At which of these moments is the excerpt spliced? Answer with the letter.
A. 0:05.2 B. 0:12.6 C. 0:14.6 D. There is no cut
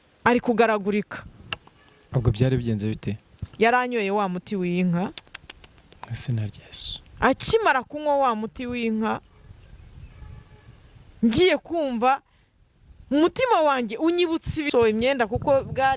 C